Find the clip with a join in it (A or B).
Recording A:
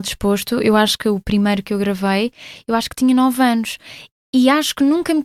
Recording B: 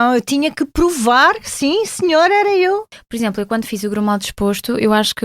B